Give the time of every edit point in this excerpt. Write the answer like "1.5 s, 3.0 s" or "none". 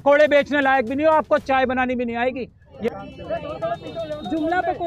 2.9 s